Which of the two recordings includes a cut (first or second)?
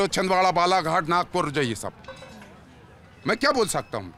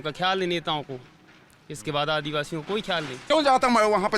second